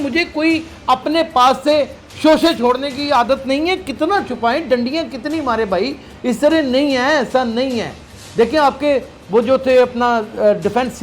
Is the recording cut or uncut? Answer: uncut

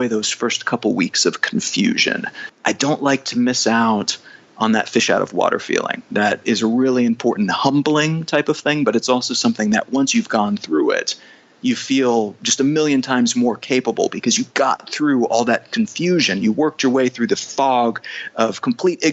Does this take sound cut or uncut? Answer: cut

